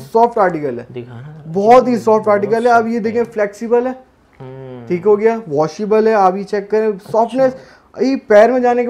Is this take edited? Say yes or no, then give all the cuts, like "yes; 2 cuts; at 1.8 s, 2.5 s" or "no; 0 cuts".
no; 0 cuts